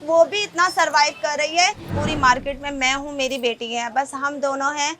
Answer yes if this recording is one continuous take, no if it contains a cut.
no